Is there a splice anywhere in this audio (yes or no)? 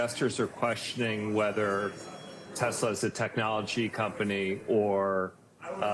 no